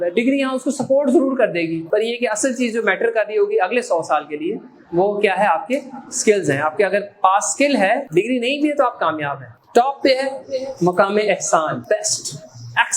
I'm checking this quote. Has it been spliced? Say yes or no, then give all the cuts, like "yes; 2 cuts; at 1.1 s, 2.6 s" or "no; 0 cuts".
yes; 4 cuts; at 1.8 s, 8.1 s, 9.5 s, 11.8 s